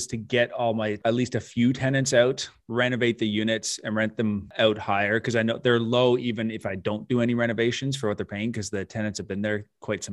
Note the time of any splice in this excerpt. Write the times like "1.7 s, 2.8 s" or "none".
1.0 s, 4.5 s